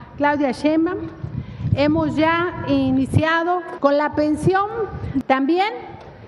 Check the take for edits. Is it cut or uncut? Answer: cut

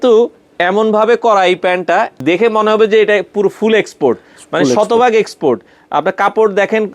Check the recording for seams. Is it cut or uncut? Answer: cut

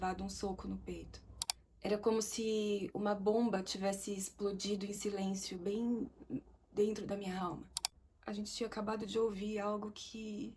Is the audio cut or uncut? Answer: cut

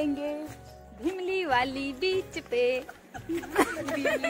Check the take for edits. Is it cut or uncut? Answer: uncut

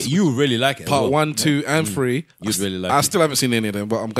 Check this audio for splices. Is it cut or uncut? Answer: uncut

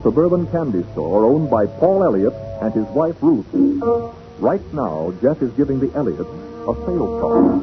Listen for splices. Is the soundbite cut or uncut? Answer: uncut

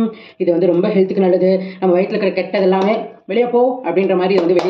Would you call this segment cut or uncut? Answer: uncut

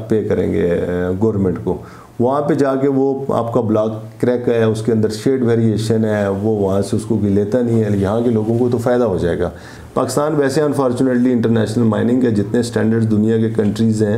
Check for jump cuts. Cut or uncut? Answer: cut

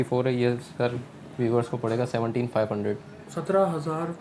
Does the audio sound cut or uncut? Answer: uncut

